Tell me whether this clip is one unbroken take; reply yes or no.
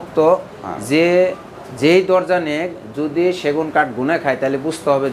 yes